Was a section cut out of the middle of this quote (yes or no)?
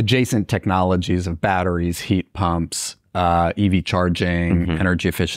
no